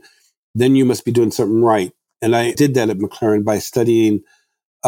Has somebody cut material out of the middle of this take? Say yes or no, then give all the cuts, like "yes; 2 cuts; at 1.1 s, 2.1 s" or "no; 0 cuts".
yes; 1 cut; at 2.2 s